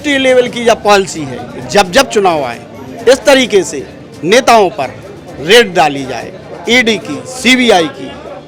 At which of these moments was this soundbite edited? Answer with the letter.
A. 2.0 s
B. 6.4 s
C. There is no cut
C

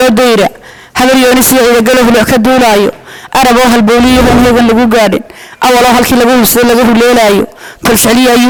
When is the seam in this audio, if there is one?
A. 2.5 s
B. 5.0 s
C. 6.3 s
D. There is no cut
D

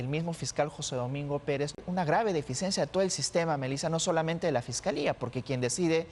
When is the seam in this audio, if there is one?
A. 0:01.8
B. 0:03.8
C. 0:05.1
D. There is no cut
A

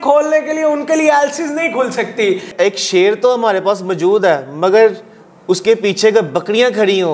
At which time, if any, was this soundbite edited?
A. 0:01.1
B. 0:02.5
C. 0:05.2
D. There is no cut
B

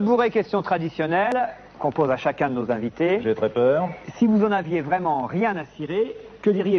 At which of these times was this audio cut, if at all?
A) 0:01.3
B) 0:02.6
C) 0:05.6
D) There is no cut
A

